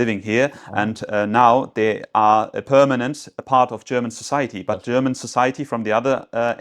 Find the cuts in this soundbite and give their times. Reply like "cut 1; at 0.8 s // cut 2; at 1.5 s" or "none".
none